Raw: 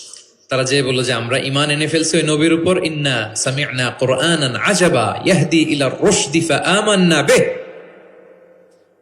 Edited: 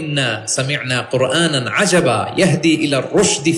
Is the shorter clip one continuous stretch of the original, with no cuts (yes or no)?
yes